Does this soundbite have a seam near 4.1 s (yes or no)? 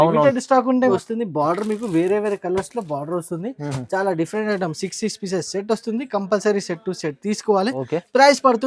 no